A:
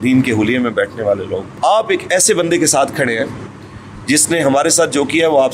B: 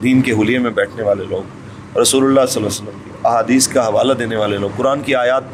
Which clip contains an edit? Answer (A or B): A